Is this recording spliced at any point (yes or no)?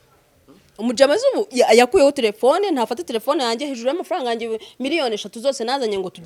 no